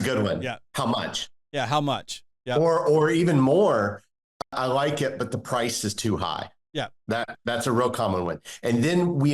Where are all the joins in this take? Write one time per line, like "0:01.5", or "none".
0:04.4